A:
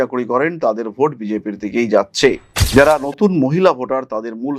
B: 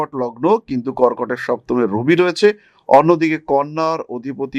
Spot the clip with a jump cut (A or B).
A